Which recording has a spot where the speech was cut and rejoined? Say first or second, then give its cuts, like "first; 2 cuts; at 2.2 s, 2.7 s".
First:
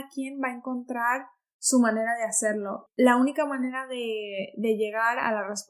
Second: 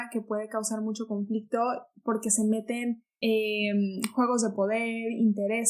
first; 1 cut; at 2.8 s